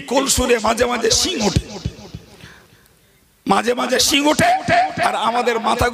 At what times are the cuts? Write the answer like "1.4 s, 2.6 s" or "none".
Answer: none